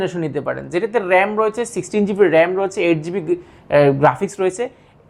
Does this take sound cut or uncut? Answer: uncut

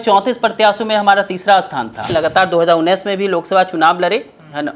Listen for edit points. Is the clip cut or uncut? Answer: cut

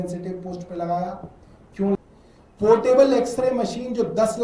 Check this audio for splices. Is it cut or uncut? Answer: cut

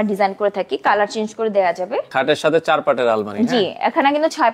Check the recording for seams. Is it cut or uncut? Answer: cut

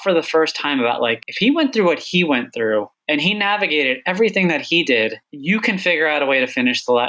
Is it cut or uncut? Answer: cut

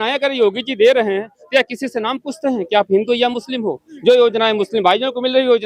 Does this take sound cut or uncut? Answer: uncut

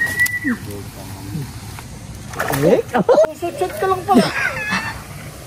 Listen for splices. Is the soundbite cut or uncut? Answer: uncut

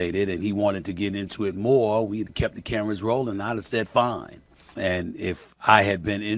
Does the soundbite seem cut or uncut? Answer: cut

